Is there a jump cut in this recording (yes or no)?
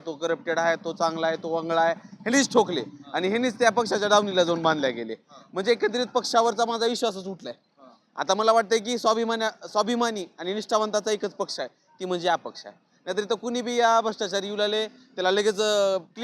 no